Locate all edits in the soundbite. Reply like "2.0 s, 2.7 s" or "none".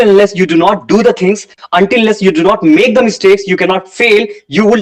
none